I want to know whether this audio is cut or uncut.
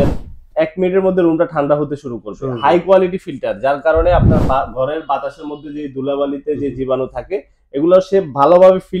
uncut